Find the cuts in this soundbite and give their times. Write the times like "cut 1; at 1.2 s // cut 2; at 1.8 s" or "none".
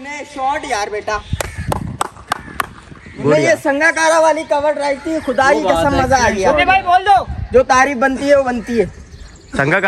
none